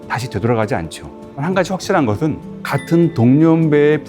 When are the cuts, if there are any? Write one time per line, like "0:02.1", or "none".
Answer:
0:01.4